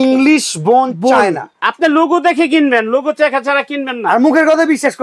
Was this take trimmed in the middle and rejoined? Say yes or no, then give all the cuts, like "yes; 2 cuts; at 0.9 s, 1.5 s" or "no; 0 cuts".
no; 0 cuts